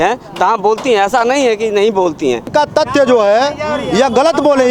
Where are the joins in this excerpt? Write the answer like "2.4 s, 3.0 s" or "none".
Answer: 2.5 s